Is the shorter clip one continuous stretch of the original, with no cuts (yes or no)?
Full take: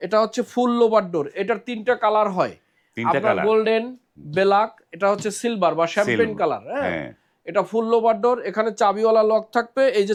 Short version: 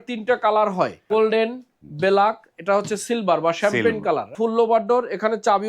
no